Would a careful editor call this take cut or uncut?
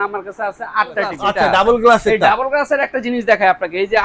cut